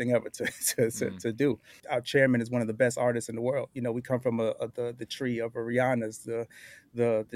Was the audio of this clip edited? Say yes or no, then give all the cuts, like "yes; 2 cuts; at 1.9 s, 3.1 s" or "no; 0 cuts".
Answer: yes; 1 cut; at 1.7 s